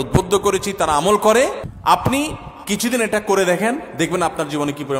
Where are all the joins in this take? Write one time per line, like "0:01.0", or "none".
0:01.7